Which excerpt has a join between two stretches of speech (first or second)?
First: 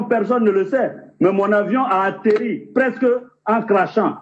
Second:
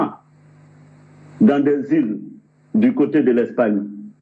first